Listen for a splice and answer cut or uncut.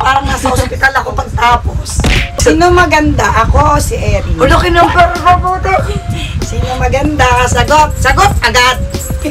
uncut